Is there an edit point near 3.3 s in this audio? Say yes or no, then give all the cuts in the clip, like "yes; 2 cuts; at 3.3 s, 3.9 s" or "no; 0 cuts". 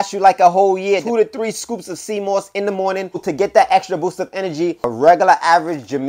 yes; 3 cuts; at 1.0 s, 3.3 s, 4.9 s